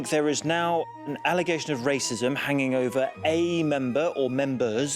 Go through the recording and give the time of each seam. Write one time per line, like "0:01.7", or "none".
0:01.0